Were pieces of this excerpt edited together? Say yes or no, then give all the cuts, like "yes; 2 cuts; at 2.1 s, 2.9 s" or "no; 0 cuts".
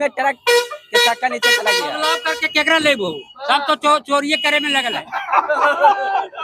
yes; 1 cut; at 2.1 s